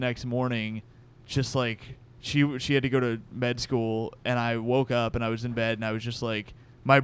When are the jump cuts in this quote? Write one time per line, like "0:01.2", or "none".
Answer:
none

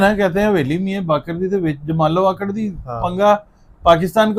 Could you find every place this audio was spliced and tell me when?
none

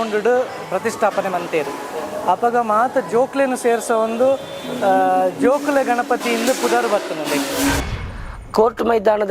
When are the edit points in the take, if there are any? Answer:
0:07.8

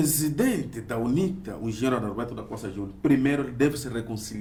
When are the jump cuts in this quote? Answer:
none

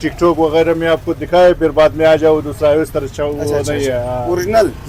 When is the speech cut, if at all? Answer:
none

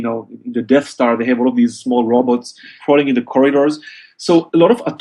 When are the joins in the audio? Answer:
0:03.3

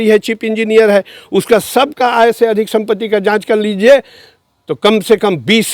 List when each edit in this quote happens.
none

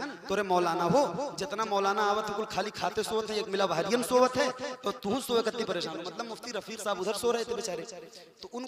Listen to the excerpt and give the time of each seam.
none

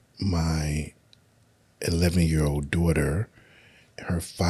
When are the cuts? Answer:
none

